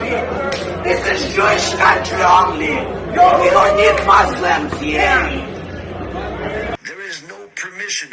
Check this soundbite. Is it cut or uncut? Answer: cut